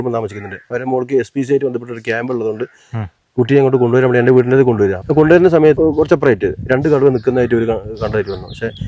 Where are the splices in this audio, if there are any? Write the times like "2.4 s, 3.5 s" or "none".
5.0 s, 5.8 s